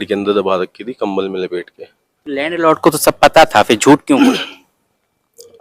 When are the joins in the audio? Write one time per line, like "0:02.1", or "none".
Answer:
none